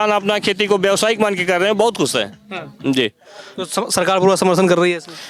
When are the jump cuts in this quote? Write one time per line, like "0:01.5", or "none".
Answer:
none